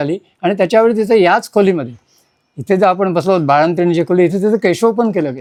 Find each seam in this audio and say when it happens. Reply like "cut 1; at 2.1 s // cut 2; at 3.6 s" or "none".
none